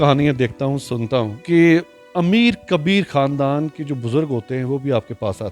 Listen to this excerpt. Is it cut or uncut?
cut